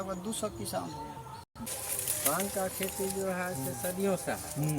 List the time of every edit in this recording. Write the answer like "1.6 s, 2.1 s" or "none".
1.6 s

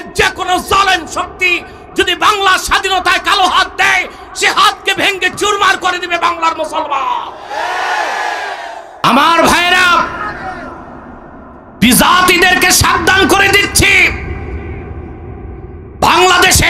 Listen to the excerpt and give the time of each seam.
9.0 s

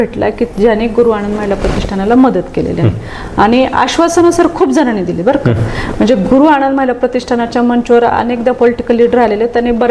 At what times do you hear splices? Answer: none

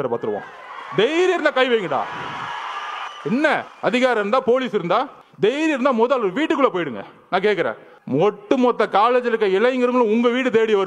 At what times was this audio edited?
3.0 s, 3.7 s, 5.2 s, 7.9 s

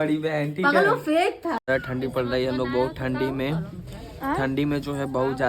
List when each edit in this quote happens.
1.6 s

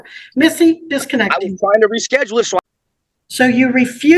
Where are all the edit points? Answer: 2.7 s

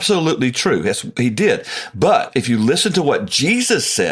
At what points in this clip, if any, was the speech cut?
2.3 s

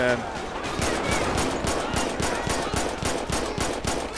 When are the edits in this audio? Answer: none

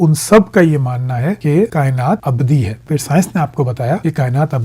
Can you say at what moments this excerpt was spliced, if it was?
2.8 s

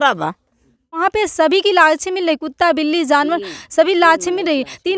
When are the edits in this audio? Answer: 1.0 s

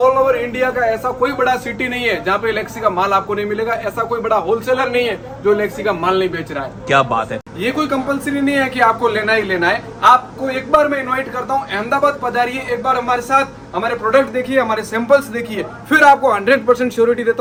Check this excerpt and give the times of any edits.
none

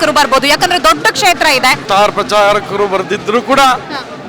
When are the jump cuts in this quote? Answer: 1.8 s

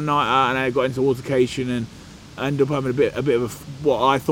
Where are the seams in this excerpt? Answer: none

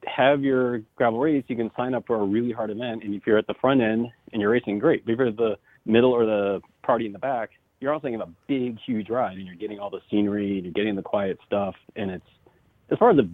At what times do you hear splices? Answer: 0.8 s, 5.7 s, 6.7 s, 7.6 s

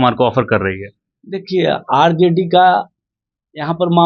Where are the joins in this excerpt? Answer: none

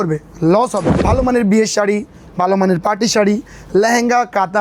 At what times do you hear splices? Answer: 0.9 s

